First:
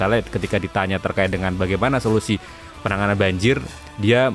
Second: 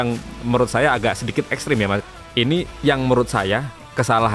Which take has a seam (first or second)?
second